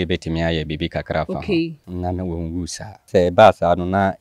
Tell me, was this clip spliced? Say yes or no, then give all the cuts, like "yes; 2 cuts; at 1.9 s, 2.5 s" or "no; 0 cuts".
yes; 2 cuts; at 1.9 s, 3.1 s